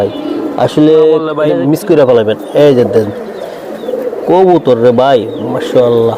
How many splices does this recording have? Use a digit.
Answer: 1